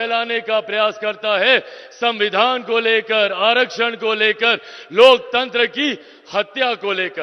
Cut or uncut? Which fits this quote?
uncut